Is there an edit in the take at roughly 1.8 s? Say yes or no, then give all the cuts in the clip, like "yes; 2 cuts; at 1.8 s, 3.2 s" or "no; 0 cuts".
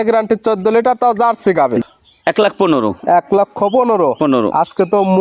yes; 1 cut; at 1.8 s